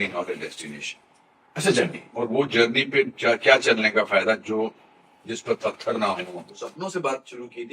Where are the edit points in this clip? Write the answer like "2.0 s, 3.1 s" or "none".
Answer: 2.1 s, 6.5 s